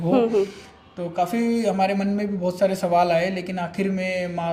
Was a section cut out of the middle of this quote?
no; 0 cuts

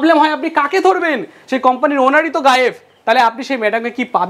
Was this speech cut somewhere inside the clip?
no; 0 cuts

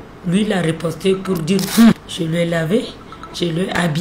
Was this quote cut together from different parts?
yes; 1 cut; at 1.9 s

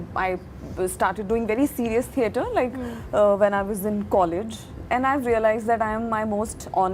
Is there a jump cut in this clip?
no; 0 cuts

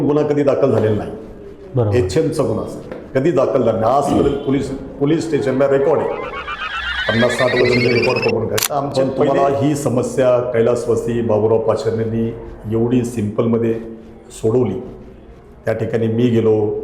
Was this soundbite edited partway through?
yes; 1 cut; at 8.9 s

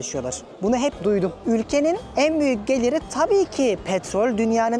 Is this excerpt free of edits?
no; 1 cut; at 1.4 s

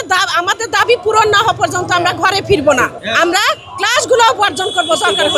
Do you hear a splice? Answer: yes; 1 cut; at 3.0 s

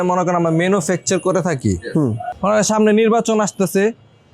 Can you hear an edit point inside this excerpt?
yes; 1 cut; at 2.4 s

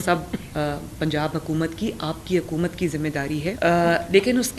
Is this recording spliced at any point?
yes; 1 cut; at 3.6 s

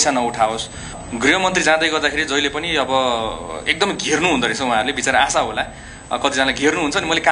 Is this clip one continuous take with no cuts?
no; 1 cut; at 1.0 s

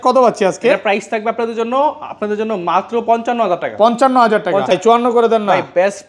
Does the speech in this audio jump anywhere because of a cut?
yes; 1 cut; at 4.7 s

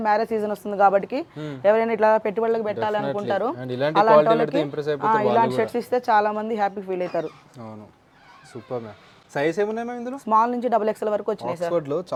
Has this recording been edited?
no; 0 cuts

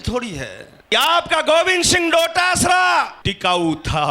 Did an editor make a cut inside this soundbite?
yes; 2 cuts; at 0.9 s, 3.2 s

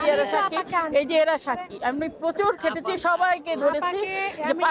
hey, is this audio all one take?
yes; 0 cuts

